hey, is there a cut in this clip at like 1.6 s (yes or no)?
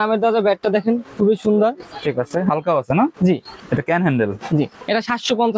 no